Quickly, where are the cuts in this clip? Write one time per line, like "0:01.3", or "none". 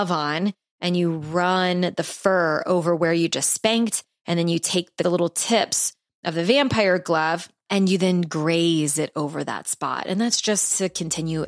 0:05.0
0:07.6